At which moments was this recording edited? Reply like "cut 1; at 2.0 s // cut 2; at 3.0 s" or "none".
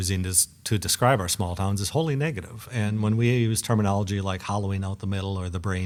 none